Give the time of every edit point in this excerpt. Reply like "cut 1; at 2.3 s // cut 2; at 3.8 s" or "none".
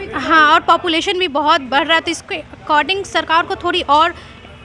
none